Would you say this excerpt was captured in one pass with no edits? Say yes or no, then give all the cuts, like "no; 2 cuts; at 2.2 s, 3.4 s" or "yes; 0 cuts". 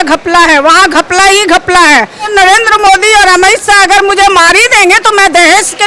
no; 1 cut; at 2.3 s